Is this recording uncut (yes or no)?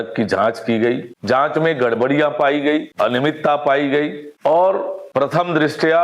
no